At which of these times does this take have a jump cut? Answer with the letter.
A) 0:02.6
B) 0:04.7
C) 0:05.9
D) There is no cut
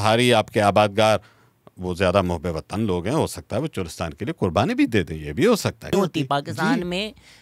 C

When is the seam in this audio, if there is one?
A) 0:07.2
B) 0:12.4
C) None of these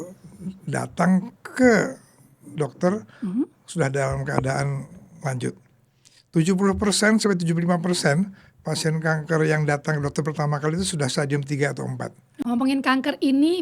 B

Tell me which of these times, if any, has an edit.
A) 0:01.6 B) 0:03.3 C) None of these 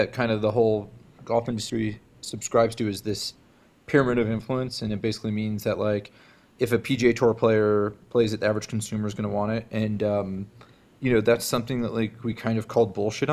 A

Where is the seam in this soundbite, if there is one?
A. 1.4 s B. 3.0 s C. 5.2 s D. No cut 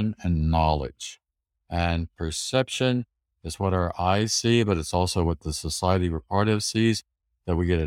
D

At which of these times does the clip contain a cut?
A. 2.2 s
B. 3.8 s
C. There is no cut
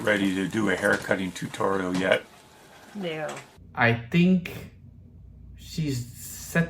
B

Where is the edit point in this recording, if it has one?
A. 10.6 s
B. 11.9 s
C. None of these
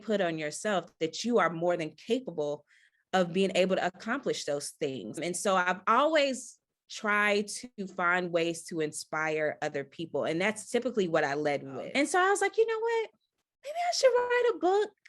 B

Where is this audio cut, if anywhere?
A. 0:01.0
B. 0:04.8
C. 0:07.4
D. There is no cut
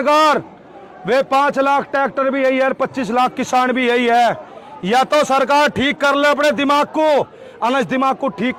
D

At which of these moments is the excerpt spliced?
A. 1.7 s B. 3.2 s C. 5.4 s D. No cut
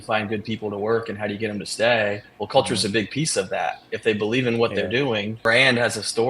C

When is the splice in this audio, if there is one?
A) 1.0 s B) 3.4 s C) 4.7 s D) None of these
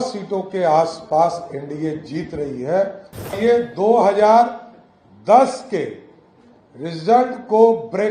B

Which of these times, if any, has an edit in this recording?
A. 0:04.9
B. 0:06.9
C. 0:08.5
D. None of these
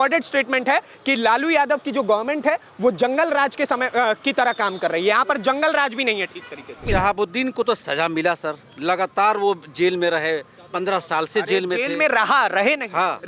B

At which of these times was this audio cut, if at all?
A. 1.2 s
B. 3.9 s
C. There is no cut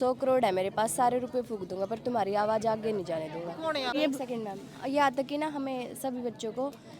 B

